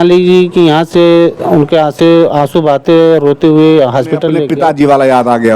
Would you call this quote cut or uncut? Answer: cut